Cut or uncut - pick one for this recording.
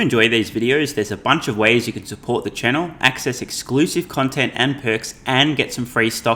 uncut